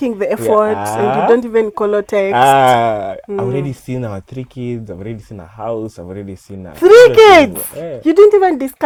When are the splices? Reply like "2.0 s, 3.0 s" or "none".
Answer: none